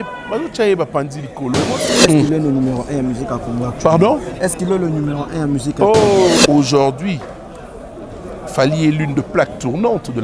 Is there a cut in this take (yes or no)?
yes